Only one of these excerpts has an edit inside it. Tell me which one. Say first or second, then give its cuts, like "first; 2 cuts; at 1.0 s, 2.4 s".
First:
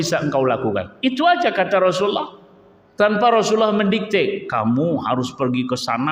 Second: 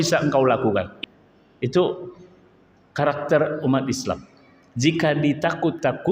second; 1 cut; at 0.9 s